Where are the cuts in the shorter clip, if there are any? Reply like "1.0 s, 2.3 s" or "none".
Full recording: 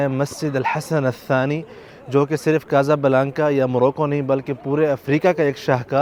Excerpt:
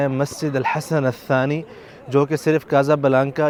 none